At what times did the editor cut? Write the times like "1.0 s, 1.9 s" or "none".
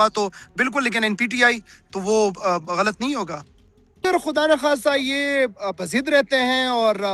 4.0 s